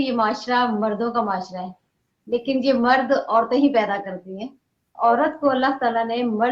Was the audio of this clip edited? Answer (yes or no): yes